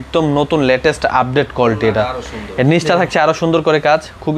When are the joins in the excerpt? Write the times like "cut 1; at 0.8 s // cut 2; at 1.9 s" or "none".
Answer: none